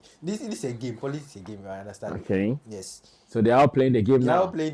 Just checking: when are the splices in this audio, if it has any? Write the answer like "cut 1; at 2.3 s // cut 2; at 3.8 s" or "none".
none